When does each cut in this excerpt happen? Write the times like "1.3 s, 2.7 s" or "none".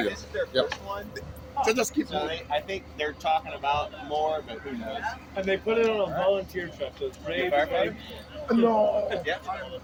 none